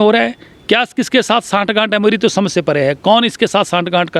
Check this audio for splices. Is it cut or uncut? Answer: uncut